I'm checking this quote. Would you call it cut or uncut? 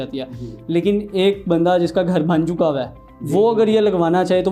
uncut